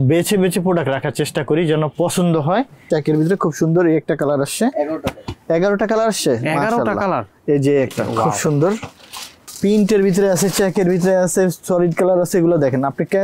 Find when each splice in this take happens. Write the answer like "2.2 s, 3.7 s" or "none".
2.9 s, 9.3 s